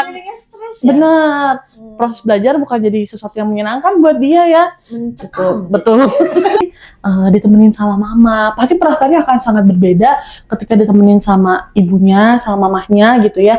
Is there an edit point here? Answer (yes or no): yes